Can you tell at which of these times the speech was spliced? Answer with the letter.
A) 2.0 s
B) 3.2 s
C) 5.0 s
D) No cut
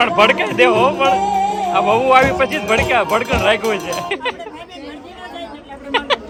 D